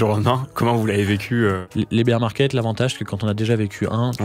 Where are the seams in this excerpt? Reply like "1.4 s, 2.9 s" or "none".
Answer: 1.6 s